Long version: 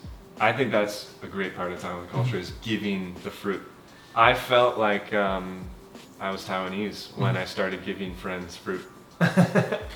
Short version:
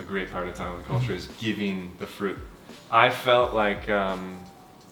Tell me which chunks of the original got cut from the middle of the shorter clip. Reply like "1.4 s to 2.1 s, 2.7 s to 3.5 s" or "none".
none